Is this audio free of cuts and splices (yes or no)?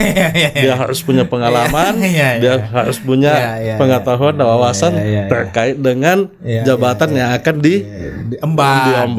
yes